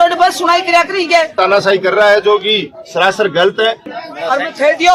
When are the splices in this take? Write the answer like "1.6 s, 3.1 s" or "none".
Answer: 1.4 s, 3.9 s